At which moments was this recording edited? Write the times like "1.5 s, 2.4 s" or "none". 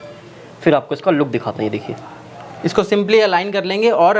none